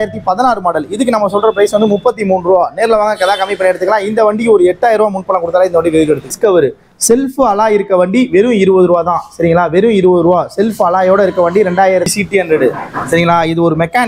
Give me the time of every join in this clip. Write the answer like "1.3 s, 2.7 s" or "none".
6.3 s, 12.1 s